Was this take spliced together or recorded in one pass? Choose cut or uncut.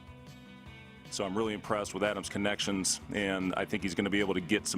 cut